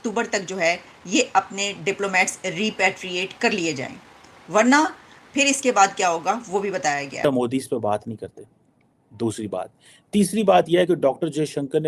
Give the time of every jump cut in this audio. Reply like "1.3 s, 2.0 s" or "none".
7.2 s